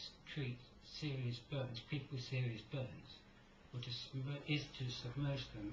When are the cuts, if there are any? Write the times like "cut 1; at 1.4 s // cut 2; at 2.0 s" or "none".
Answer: none